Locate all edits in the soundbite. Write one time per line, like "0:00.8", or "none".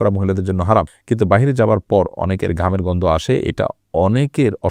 0:01.0

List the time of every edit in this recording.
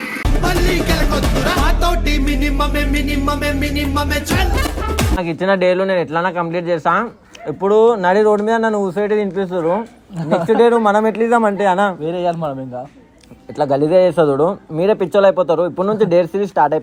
none

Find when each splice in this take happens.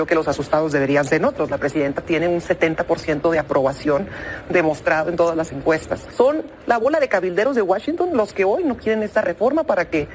0:06.1

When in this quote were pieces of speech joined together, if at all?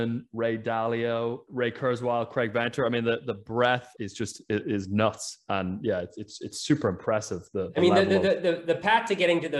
0:01.5
0:03.9

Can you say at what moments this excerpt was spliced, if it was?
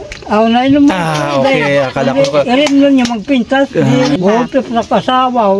0:04.4

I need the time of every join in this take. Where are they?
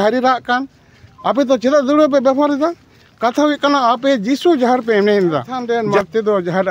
0:05.5

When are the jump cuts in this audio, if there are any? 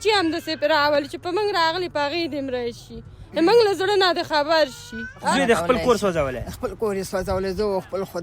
0:05.3

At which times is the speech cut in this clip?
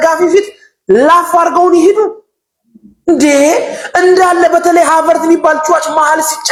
none

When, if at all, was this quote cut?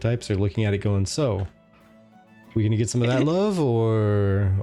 none

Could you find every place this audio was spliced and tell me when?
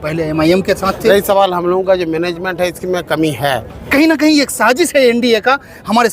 0:01.1
0:03.8

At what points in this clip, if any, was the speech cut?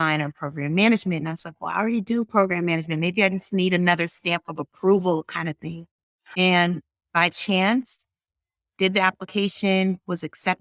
0:06.3

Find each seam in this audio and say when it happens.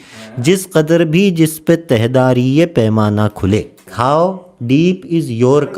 0:03.8

